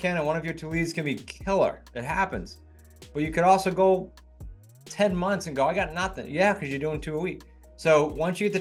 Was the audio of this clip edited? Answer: no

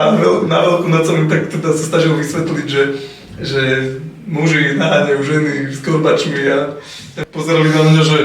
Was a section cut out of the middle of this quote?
yes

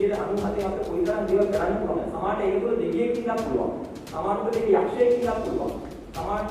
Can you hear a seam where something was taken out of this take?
no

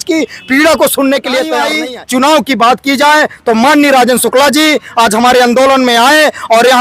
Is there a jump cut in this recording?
yes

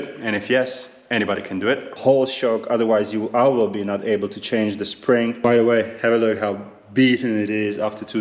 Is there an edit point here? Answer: yes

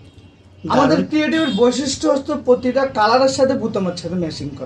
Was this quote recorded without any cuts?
yes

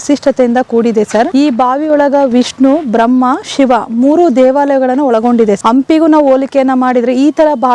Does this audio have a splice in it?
yes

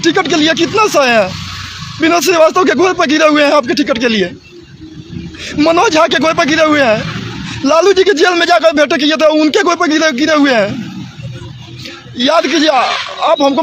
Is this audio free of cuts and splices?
yes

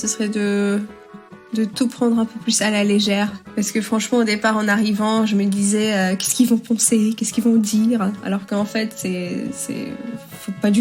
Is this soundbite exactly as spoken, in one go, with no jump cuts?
no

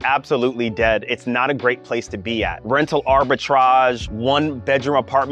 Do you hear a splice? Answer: yes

